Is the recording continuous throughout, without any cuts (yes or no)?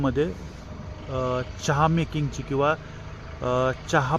yes